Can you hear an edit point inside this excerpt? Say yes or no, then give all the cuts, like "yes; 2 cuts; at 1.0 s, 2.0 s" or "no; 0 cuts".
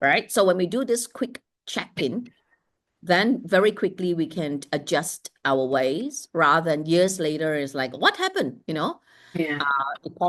no; 0 cuts